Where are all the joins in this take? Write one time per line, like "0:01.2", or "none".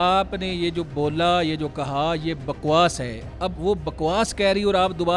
none